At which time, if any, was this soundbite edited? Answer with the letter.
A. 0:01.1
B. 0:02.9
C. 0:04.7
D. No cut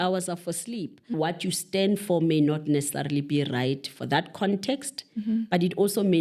A